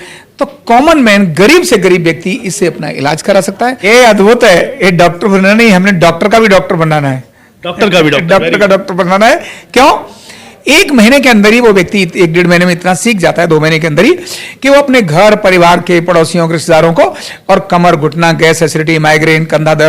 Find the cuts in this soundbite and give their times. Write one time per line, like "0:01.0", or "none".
0:03.8